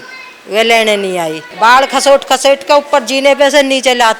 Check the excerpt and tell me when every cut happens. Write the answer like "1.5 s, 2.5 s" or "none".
1.4 s